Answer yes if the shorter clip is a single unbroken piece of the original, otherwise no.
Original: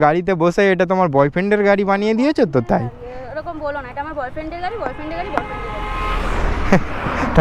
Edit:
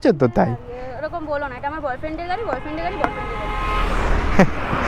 yes